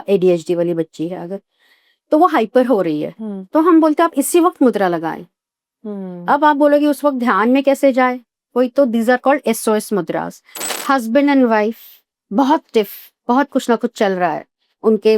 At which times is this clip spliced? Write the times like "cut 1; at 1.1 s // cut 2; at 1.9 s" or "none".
cut 1; at 10.5 s